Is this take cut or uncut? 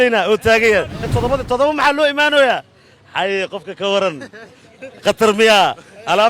cut